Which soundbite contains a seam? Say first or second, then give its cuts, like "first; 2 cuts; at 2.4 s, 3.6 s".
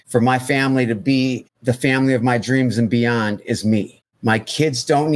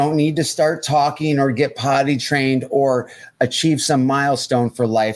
first; 2 cuts; at 1.5 s, 4.0 s